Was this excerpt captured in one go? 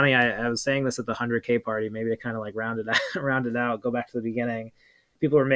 yes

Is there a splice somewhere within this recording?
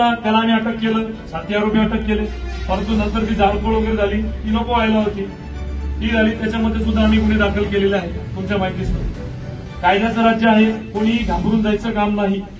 no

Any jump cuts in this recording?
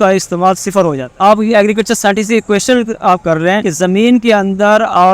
yes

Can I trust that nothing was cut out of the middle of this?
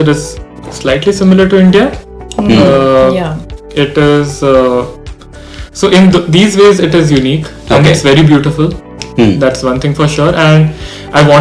yes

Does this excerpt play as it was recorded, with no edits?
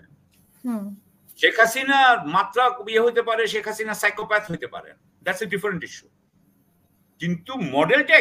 yes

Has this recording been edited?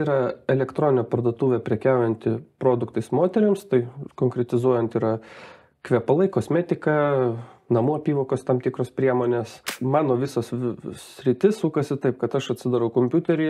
yes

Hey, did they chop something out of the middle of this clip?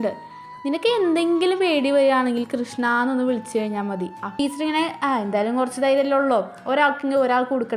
yes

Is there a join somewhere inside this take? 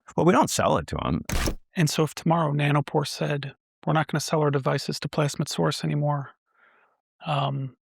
yes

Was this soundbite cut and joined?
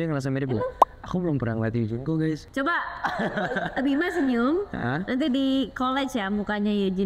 no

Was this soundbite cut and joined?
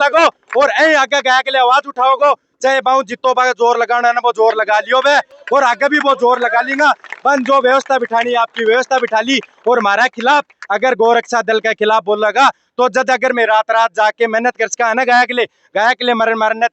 no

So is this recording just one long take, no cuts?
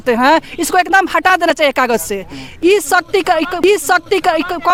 yes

